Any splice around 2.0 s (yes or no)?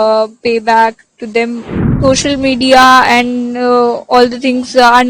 yes